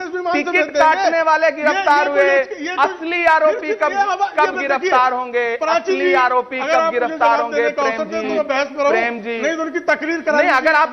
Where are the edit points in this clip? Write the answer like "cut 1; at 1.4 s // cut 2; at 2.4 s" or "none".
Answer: none